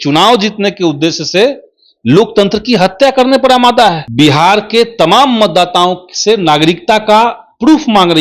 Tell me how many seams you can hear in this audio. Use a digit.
1